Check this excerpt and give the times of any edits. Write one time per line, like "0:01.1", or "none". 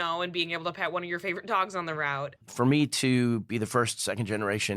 0:02.4